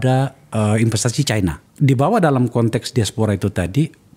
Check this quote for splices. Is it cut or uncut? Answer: cut